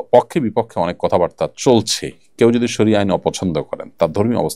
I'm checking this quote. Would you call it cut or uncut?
uncut